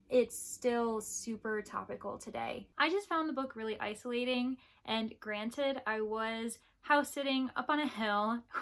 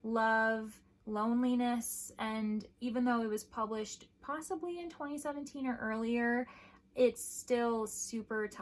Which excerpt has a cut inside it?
first; 1 cut; at 2.7 s

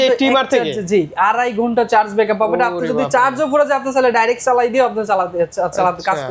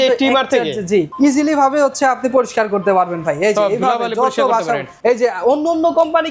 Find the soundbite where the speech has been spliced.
second; 2 cuts; at 1.1 s, 4.9 s

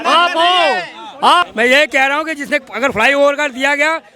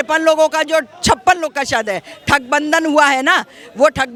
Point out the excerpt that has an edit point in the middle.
first; 1 cut; at 1.5 s

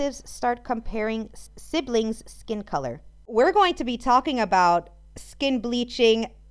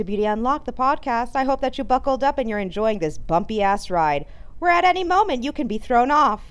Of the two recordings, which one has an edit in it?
first; 2 cuts; at 1.4 s, 3.2 s

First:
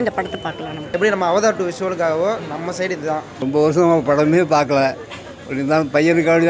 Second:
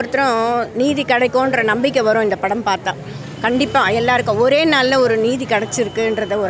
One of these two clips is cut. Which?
first; 2 cuts; at 0.9 s, 3.4 s

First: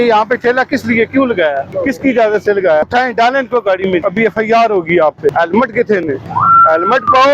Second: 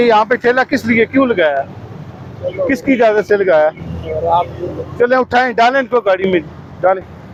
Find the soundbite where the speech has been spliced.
first; 5 cuts; at 1.7 s, 2.9 s, 4.0 s, 5.3 s, 6.2 s

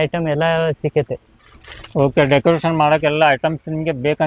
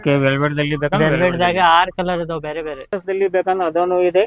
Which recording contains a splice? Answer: second; 1 cut; at 3.0 s

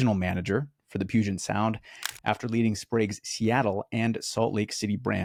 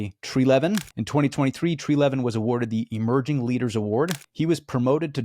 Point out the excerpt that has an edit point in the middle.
second; 2 cuts; at 0.9 s, 4.2 s

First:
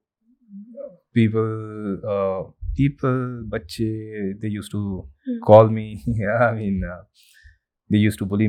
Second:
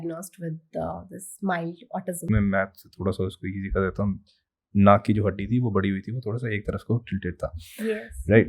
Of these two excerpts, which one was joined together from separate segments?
second; 1 cut; at 2.2 s

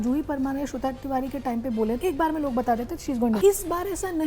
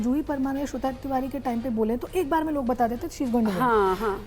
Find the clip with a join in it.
first; 2 cuts; at 2.0 s, 3.4 s

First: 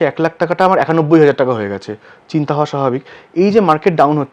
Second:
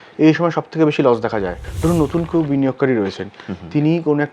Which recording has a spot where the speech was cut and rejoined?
second; 1 cut; at 1.7 s

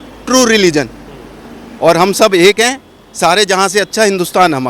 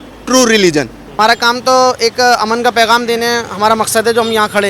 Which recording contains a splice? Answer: second; 1 cut; at 1.0 s

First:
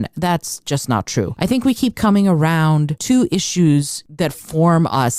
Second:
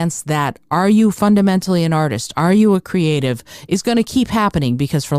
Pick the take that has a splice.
first; 3 cuts; at 1.3 s, 2.9 s, 4.0 s

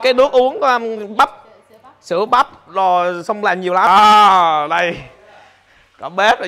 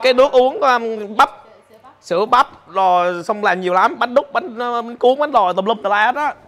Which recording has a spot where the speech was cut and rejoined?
first; 1 cut; at 3.9 s

